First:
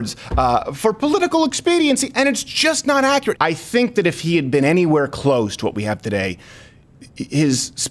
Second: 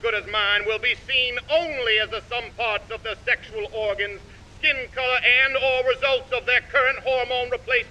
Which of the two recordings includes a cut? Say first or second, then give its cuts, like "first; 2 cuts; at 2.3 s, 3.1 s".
first; 1 cut; at 3.3 s